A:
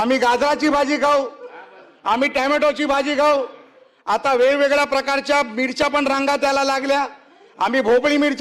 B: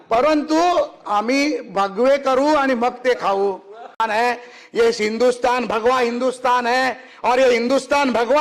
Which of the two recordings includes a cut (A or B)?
B